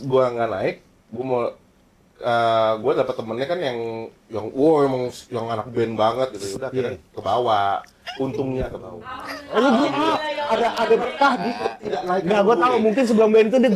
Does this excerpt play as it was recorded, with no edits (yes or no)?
yes